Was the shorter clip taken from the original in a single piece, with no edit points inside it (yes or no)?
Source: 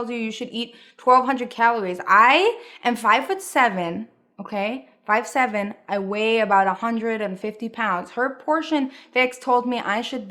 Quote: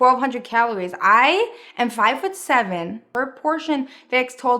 no